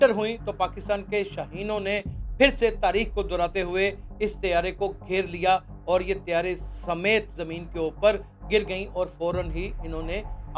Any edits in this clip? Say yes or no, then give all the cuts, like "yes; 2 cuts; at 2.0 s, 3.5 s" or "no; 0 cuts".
no; 0 cuts